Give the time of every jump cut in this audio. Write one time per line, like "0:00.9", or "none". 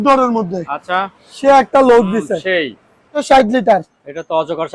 0:03.2